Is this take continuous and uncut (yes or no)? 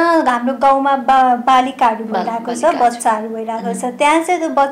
yes